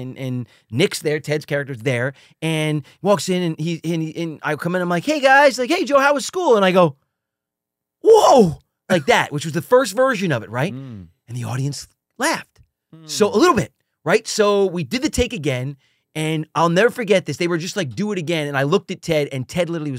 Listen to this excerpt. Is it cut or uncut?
uncut